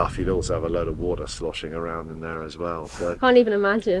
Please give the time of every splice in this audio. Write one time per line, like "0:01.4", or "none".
none